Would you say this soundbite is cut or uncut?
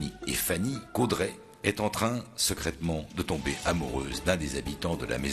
cut